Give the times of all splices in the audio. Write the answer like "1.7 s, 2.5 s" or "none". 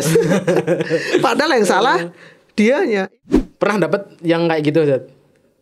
3.1 s